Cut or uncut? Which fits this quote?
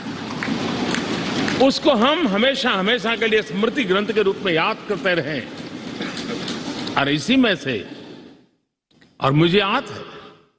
uncut